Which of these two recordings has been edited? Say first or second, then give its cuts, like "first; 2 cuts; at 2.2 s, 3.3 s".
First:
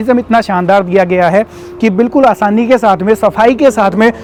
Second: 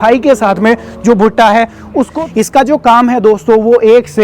second; 1 cut; at 2.2 s